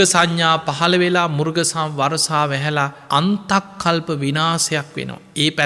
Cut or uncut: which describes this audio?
uncut